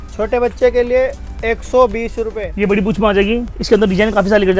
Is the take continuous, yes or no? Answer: no